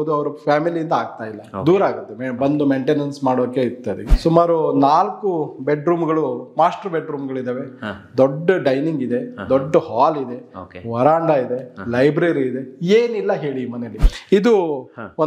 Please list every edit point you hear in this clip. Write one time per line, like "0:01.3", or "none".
0:04.1
0:13.9